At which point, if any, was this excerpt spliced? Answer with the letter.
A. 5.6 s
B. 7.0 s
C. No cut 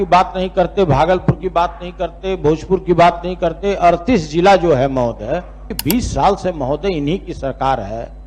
A